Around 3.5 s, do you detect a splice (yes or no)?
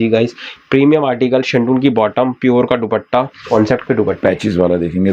yes